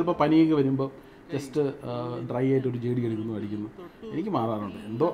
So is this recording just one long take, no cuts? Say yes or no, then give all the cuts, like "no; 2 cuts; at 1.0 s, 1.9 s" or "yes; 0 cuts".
yes; 0 cuts